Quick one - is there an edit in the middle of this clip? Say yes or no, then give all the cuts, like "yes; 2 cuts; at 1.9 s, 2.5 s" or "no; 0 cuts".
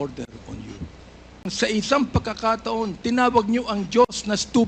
yes; 1 cut; at 1.5 s